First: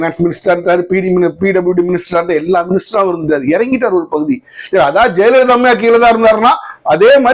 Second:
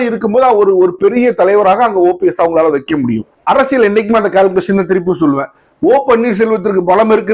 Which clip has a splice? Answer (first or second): second